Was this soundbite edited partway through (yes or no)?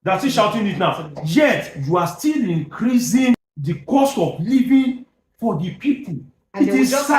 yes